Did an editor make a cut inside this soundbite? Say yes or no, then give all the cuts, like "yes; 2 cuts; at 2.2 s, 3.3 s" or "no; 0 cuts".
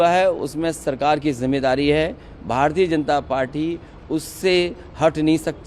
no; 0 cuts